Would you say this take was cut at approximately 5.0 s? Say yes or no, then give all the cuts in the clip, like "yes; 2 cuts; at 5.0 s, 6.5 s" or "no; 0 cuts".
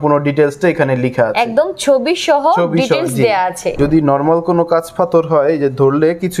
no; 1 cut; at 3.8 s